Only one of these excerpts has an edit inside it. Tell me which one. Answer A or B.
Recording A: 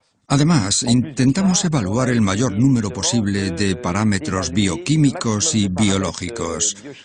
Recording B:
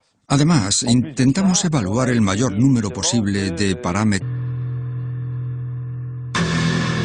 A